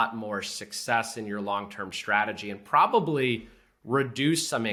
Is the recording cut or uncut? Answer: uncut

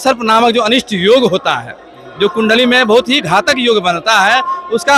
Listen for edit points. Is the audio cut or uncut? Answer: uncut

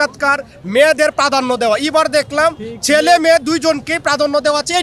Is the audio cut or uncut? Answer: uncut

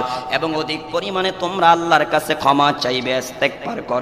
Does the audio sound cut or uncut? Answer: uncut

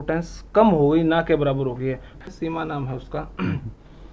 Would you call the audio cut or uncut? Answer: cut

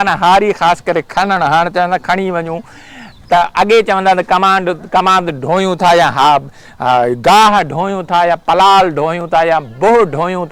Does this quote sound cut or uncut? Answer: uncut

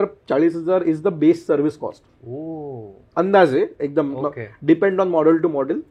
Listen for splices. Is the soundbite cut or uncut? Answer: uncut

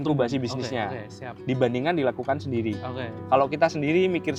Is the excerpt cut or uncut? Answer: uncut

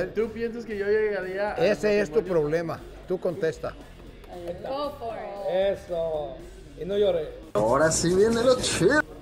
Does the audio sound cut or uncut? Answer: uncut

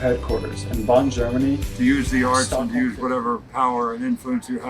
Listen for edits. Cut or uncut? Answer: cut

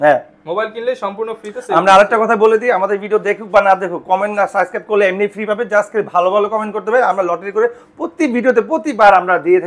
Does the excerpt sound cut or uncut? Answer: uncut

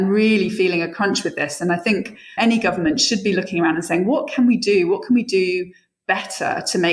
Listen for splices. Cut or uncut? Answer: uncut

